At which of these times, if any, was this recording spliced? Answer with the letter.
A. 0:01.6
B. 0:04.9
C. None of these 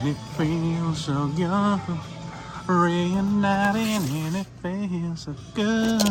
C